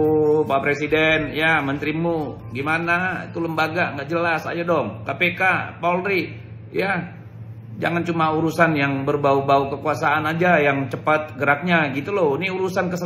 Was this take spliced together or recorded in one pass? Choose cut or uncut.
uncut